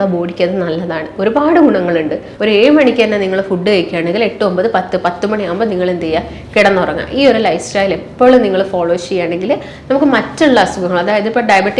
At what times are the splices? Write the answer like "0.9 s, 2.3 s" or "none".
2.3 s